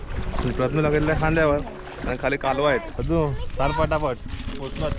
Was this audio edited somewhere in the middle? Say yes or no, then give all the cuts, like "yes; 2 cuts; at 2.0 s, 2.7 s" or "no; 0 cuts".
yes; 1 cut; at 2.9 s